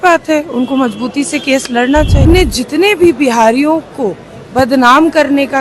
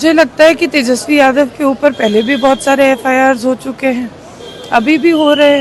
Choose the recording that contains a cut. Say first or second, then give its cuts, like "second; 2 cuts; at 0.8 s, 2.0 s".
first; 1 cut; at 2.2 s